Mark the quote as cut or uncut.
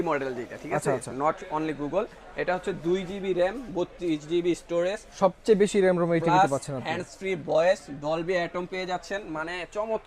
uncut